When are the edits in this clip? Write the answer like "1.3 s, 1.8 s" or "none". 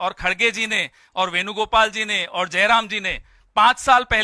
none